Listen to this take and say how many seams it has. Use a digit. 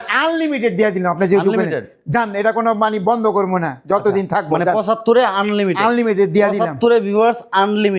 0